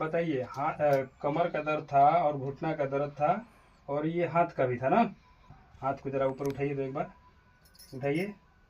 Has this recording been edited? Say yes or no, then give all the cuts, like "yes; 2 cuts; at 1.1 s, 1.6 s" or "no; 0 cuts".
yes; 1 cut; at 5.5 s